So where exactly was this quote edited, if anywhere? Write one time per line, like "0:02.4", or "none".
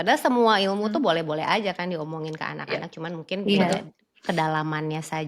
none